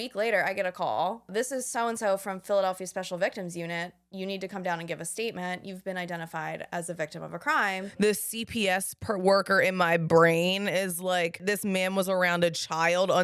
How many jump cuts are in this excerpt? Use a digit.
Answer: 3